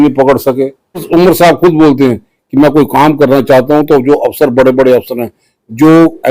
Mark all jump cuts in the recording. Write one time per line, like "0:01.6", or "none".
0:01.1